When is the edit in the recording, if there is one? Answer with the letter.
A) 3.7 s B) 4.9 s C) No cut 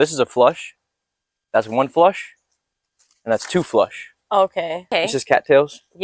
B